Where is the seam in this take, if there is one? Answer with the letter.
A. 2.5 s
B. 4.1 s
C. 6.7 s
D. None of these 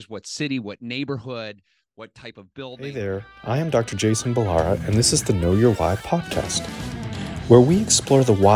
A